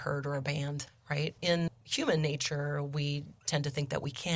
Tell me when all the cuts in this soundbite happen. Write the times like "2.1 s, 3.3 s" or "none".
0.9 s, 1.8 s